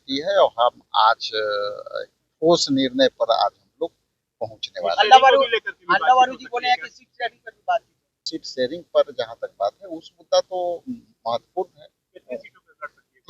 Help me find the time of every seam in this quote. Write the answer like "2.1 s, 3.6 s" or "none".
8.4 s